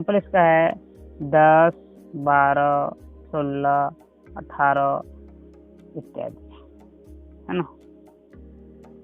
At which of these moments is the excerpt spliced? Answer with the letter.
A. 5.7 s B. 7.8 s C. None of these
B